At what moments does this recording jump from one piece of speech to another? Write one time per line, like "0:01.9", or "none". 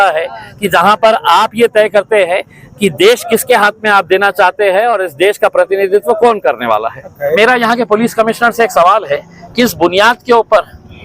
0:07.4